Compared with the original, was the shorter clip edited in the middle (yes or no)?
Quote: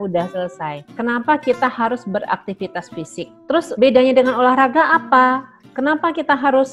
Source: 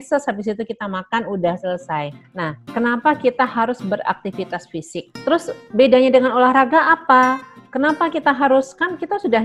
yes